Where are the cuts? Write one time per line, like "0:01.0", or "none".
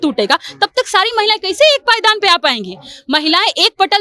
none